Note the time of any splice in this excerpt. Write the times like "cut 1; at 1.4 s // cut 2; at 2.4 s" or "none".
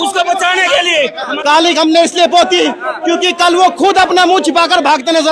cut 1; at 1.2 s